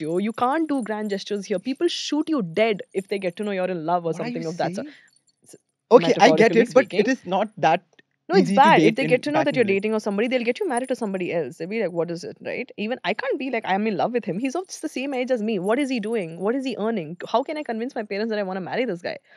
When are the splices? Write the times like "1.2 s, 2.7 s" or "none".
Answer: none